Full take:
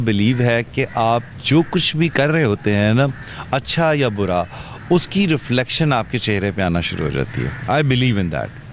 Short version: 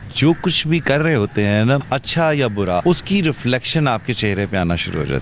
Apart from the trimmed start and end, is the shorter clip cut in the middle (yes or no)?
yes